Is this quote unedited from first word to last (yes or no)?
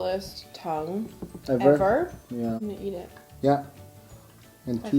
no